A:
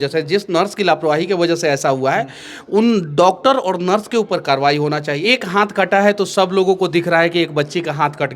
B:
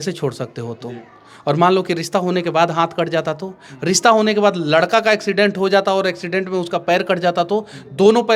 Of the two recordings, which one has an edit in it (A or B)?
A